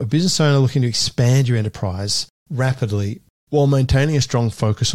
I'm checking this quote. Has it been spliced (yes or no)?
yes